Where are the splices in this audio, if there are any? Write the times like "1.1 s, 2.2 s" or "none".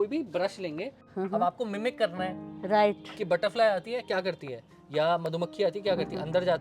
1.0 s